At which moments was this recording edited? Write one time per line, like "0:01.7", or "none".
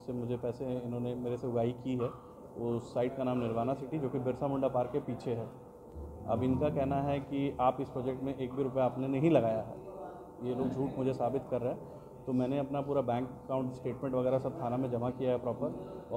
none